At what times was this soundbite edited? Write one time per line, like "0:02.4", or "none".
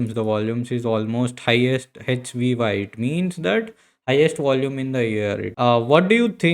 0:05.5